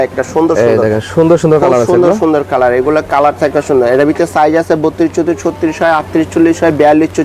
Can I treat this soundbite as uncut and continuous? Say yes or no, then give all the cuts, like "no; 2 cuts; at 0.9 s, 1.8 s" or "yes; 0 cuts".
yes; 0 cuts